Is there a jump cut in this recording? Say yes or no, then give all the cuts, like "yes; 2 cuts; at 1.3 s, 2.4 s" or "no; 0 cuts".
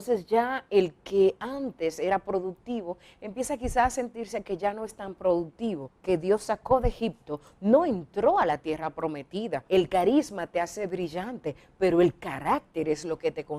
yes; 2 cuts; at 5.9 s, 9.6 s